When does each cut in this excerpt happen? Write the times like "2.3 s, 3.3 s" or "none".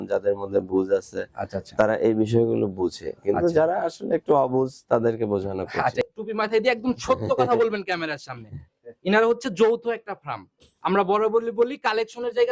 6.0 s